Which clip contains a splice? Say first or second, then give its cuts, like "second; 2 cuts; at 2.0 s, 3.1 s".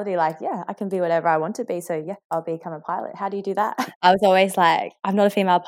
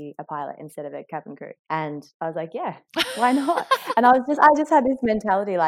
first; 2 cuts; at 2.2 s, 3.8 s